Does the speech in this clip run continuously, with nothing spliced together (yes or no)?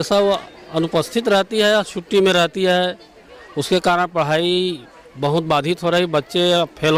yes